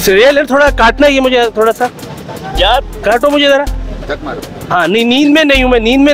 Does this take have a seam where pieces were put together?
no; 0 cuts

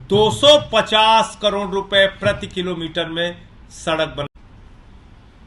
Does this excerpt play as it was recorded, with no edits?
no; 1 cut; at 4.3 s

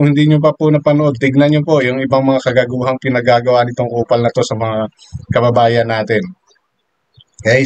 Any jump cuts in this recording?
no; 0 cuts

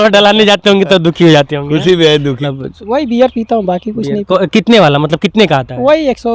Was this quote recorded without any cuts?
no; 1 cut; at 2.4 s

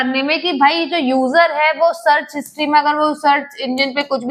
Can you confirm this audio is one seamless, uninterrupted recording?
yes; 0 cuts

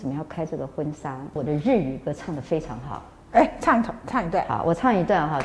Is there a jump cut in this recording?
yes; 1 cut; at 1.4 s

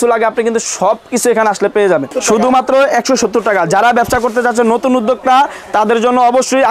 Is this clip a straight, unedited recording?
no; 1 cut; at 2.1 s

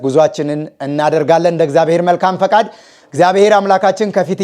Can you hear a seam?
no; 0 cuts

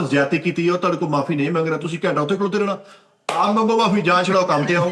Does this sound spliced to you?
no; 0 cuts

